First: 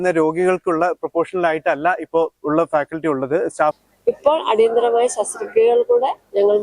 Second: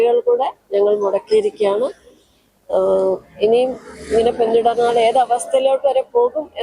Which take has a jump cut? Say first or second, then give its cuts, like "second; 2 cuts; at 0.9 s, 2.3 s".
first; 1 cut; at 3.9 s